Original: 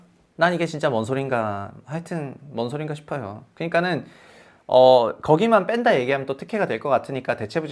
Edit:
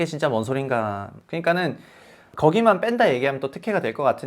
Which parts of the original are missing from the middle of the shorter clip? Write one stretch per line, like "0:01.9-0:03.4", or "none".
0:01.8-0:03.4
0:04.6-0:05.2